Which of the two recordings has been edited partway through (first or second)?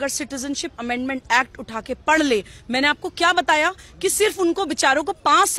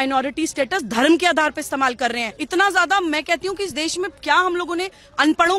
second